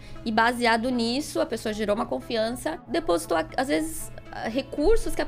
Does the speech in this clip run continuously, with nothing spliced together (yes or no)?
no